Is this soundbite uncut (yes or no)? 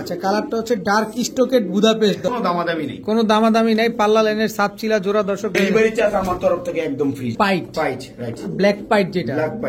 no